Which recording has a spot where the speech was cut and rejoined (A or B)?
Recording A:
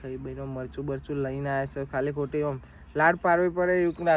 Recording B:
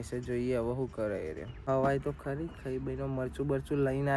B